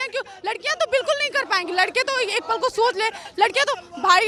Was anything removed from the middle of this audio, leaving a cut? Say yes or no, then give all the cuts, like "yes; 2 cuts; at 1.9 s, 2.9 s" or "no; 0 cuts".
no; 0 cuts